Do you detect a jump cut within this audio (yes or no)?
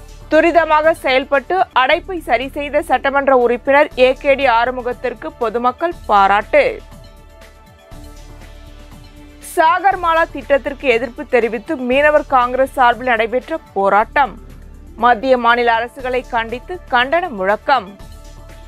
yes